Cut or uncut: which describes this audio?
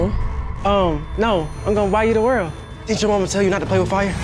cut